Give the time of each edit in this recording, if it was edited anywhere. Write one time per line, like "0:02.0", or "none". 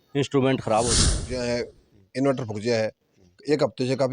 0:01.2